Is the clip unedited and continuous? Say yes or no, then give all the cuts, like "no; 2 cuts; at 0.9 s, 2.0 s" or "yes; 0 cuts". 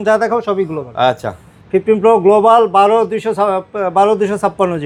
yes; 0 cuts